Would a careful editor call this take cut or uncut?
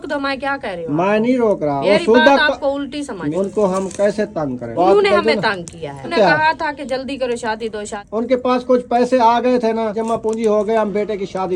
cut